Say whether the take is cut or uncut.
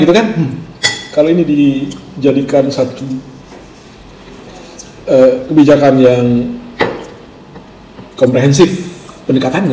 uncut